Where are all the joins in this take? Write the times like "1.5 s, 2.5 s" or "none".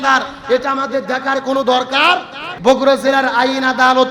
2.4 s